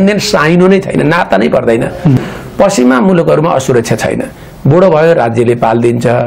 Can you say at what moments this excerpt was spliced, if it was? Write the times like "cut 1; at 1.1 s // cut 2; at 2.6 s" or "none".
cut 1; at 2.2 s